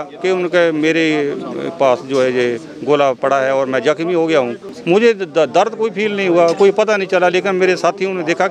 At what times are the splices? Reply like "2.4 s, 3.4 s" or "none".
4.7 s